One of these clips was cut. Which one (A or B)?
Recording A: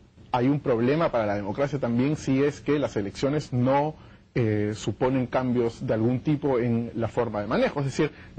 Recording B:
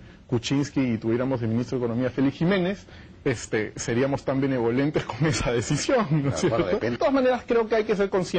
B